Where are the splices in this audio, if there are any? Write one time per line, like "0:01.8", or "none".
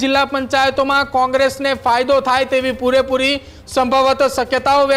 none